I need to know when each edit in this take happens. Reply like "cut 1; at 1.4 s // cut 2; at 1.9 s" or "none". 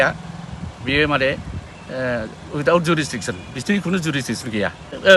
none

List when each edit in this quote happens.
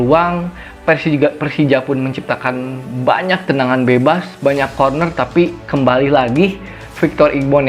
none

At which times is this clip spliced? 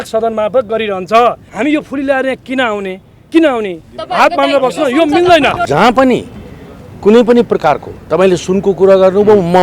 cut 1; at 1.5 s // cut 2; at 5.6 s

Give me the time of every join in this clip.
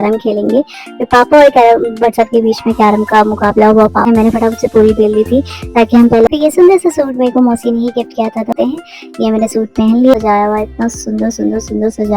cut 1; at 4.1 s // cut 2; at 6.3 s // cut 3; at 8.5 s // cut 4; at 10.1 s

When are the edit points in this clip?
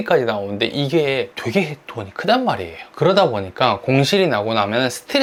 none

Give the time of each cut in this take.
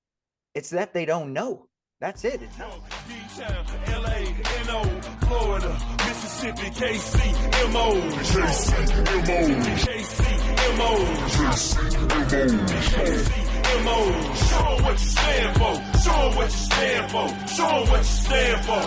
cut 1; at 2.5 s

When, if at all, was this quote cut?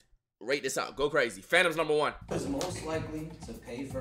cut 1; at 2.3 s

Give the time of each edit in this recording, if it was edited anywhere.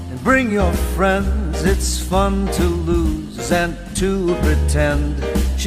cut 1; at 4.6 s

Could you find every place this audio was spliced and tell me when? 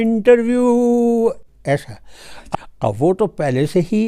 cut 1; at 2.3 s

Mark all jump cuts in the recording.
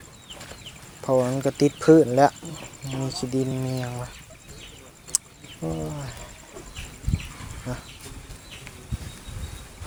none

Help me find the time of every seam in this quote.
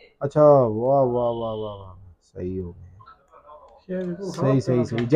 none

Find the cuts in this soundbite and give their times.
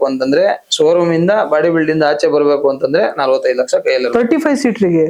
none

